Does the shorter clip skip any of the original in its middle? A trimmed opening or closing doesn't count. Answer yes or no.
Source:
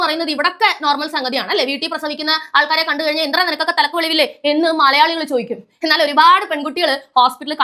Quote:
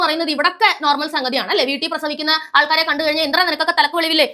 no